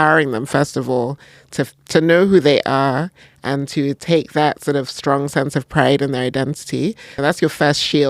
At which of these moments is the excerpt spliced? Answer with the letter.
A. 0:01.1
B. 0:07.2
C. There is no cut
B